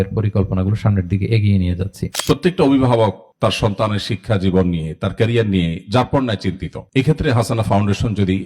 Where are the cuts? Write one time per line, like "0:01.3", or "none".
0:02.1